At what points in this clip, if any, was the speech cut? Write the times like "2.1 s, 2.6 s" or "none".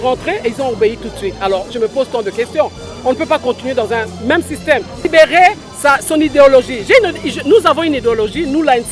5.1 s